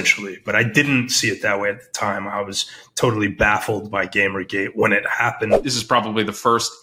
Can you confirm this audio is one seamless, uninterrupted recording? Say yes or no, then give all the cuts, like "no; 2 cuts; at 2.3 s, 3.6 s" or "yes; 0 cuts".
no; 1 cut; at 5.6 s